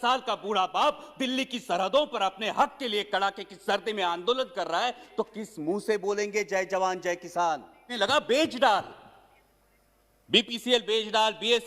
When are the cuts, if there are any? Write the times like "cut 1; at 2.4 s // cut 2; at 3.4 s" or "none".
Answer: cut 1; at 7.8 s